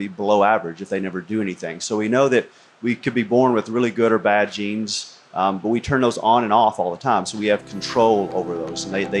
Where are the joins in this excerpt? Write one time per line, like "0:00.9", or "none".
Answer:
none